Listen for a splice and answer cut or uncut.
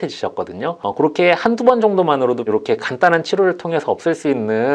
cut